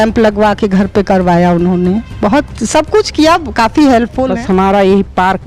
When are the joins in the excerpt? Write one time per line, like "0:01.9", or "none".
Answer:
0:04.2